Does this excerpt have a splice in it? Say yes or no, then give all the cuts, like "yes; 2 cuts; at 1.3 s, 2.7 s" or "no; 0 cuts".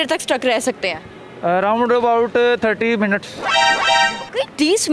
no; 0 cuts